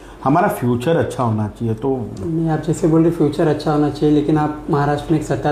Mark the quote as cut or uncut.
uncut